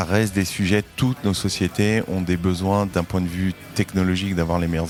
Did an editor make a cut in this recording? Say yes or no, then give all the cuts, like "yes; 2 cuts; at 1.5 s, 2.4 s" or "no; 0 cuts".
no; 0 cuts